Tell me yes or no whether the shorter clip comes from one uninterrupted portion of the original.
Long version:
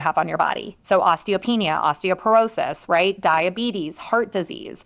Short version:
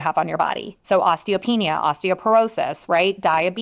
yes